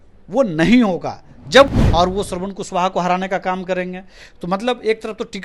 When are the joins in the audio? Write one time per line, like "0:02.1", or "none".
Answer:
0:01.7